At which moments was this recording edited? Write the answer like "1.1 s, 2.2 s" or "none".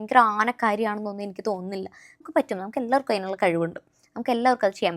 2.2 s